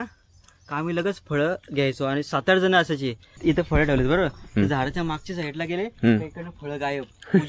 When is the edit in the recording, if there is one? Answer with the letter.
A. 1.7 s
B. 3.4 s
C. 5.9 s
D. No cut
B